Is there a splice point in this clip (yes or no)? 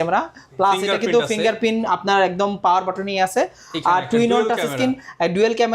no